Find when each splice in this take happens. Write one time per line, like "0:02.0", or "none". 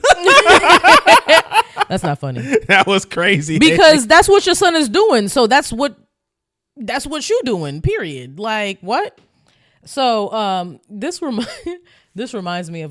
none